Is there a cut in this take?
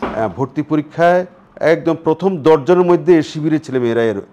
yes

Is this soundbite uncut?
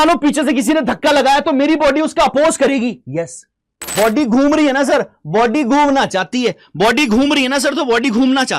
no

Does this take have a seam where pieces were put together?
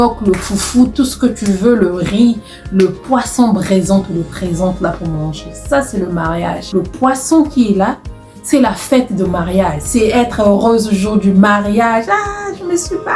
yes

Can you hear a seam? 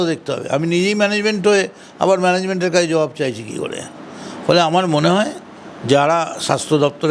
no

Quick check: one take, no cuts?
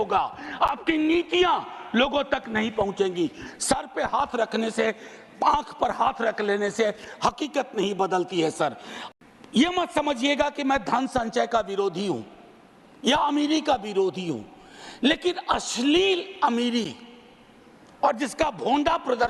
no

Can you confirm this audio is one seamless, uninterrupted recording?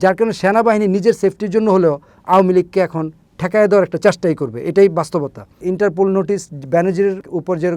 no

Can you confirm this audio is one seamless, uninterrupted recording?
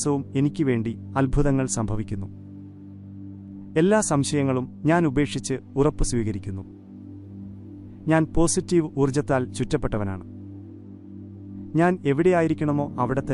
no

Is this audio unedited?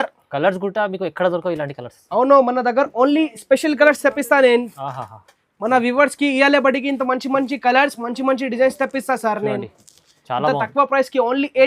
yes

